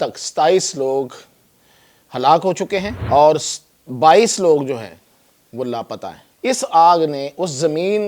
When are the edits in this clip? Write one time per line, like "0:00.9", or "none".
0:03.0
0:06.2